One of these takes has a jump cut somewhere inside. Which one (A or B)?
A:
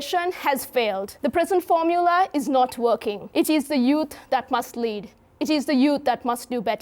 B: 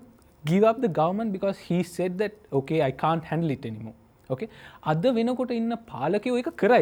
A